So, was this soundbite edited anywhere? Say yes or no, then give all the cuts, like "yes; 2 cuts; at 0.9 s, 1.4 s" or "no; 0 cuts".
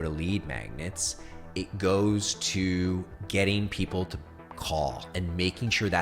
yes; 1 cut; at 3.1 s